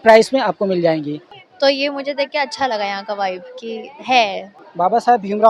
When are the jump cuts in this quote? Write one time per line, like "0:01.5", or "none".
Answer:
0:01.3
0:04.5